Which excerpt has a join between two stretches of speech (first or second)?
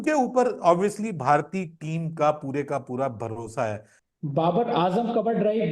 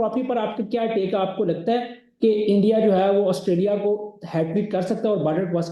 first